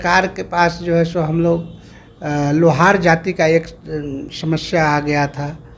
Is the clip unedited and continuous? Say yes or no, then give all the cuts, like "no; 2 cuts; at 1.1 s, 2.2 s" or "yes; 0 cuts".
yes; 0 cuts